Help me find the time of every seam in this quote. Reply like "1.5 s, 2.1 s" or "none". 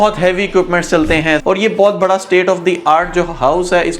1.4 s